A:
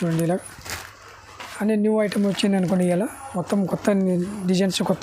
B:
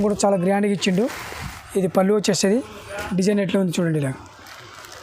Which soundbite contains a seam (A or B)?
B